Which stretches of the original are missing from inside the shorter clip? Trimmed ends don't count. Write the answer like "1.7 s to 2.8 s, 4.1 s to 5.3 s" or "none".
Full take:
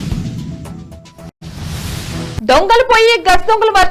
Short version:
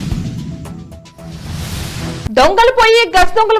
1.3 s to 1.4 s